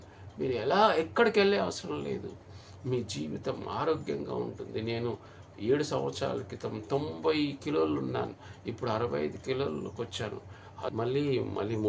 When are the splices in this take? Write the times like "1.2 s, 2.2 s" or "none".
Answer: 10.9 s